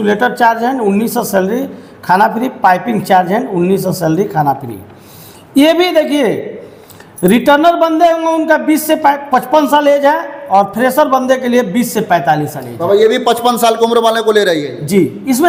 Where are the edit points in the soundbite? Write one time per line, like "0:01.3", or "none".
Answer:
none